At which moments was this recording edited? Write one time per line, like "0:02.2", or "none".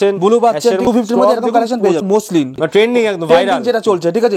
0:00.9
0:02.5